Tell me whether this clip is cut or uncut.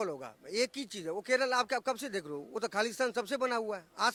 uncut